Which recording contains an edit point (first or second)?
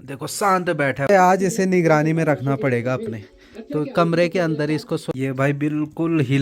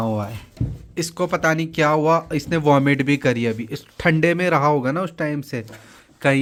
first